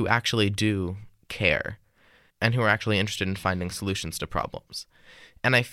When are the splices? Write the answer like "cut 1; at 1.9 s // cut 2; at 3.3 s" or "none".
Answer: cut 1; at 2.3 s